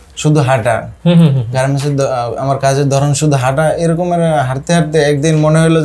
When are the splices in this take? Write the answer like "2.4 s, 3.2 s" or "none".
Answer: none